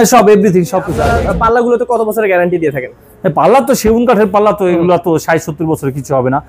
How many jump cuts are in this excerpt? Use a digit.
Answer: 1